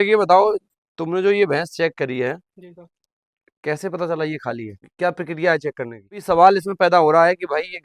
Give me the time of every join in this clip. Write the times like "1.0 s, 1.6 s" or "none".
4.8 s, 6.2 s